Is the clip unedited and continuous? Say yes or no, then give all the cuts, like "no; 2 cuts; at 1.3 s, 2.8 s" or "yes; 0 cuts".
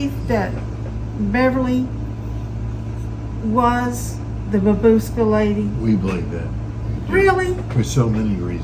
yes; 0 cuts